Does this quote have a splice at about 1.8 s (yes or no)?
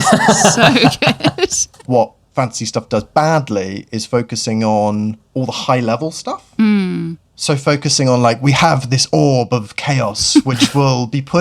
yes